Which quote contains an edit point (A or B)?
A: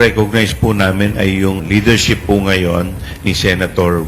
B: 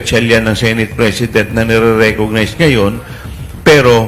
A